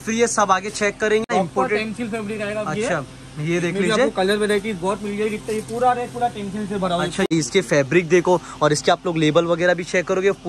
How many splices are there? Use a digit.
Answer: 2